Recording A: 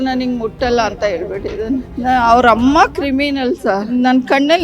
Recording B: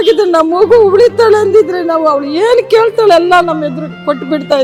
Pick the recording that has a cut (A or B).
A